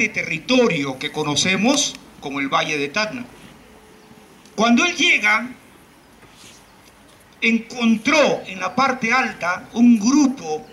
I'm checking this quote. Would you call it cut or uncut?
cut